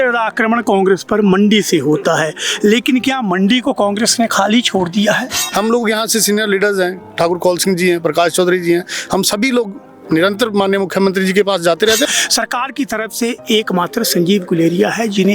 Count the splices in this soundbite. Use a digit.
2